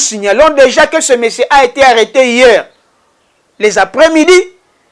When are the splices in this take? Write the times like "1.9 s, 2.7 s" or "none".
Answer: none